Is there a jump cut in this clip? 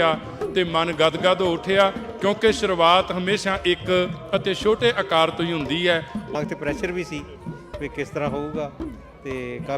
yes; 1 cut; at 6.3 s

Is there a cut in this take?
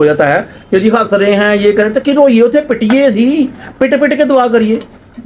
no; 0 cuts

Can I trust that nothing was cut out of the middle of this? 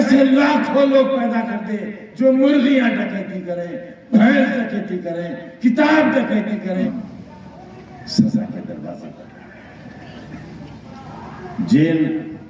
no; 1 cut; at 6.8 s

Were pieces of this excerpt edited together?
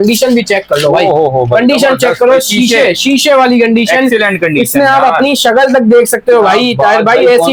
no; 0 cuts

